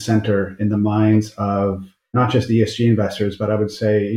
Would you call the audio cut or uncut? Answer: cut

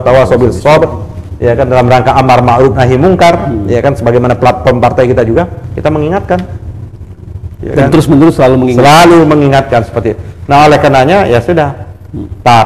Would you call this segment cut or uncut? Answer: uncut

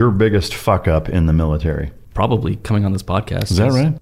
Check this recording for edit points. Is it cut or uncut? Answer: cut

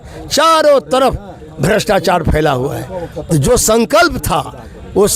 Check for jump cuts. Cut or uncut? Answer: uncut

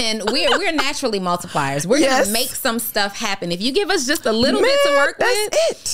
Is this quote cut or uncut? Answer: uncut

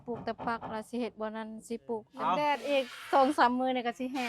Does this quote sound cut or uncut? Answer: cut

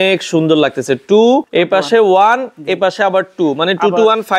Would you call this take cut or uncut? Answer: cut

